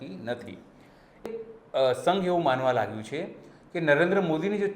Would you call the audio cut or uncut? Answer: cut